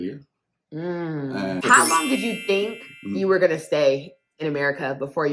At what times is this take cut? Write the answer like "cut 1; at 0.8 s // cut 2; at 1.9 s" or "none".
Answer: cut 1; at 1.6 s